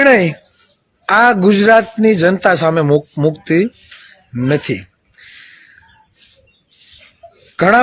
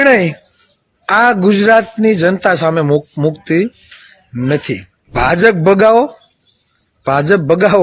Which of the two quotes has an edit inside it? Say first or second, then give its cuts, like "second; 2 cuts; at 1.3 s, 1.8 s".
second; 1 cut; at 5.1 s